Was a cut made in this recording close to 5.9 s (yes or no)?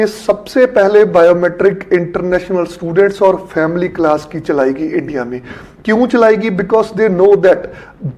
no